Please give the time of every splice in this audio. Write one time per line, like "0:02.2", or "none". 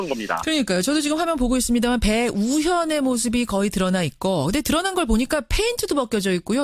none

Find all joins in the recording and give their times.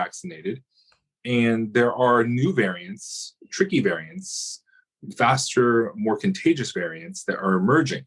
none

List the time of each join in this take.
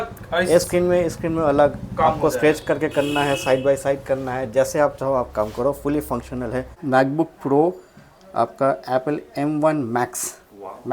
0:06.8

